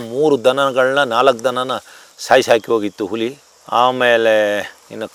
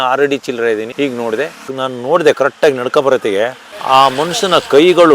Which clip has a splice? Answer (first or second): second